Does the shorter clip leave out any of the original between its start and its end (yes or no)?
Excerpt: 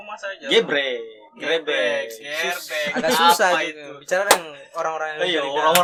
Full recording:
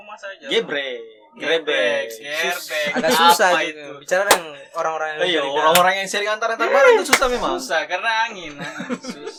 no